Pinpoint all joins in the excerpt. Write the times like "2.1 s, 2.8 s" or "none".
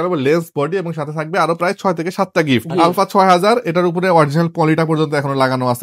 2.7 s